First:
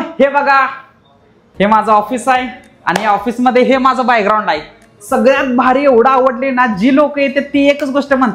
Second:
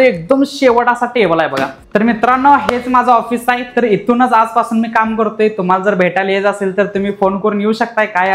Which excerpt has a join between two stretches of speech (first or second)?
second